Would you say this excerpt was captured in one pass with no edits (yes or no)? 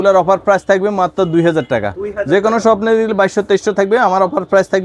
yes